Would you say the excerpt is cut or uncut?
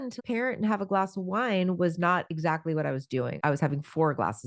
cut